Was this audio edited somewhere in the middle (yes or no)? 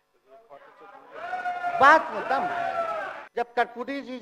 yes